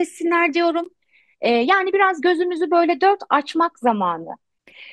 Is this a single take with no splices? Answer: yes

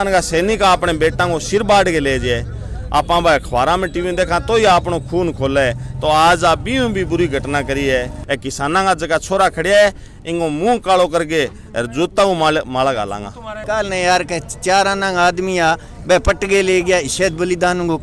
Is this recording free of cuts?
no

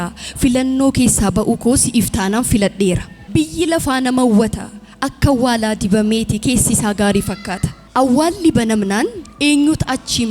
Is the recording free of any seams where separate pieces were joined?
no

